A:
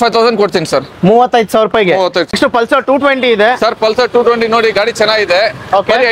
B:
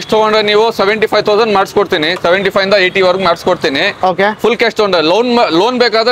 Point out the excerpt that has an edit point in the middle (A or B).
A